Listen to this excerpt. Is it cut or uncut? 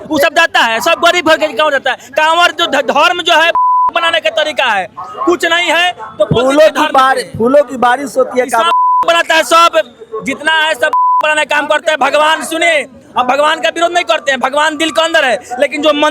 uncut